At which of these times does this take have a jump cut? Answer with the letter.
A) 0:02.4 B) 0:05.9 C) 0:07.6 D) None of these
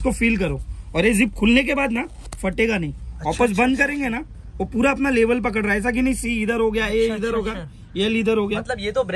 D